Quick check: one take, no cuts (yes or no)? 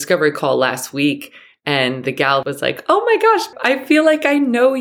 no